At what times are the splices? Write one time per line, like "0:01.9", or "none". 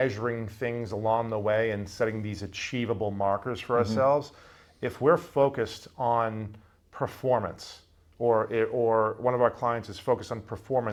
none